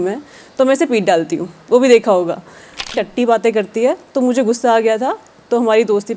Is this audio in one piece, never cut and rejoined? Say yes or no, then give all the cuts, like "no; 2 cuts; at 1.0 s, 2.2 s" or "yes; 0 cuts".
no; 1 cut; at 2.9 s